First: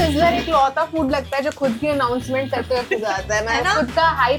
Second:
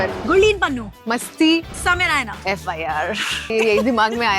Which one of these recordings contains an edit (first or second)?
second